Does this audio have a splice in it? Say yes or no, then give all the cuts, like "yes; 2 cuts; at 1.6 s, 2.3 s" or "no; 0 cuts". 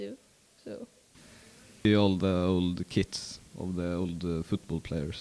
yes; 1 cut; at 1.8 s